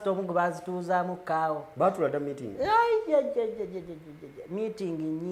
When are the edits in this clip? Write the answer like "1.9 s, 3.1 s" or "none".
none